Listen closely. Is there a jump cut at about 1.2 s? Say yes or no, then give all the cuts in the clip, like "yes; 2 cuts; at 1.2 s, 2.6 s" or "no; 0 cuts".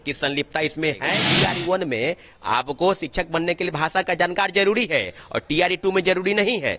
yes; 1 cut; at 1.2 s